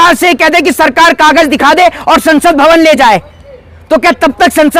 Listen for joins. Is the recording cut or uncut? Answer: uncut